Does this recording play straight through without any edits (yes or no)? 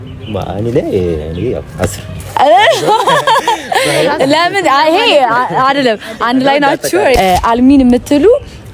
no